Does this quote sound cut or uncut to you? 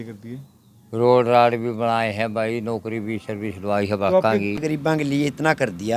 cut